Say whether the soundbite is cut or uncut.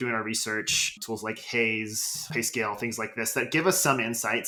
uncut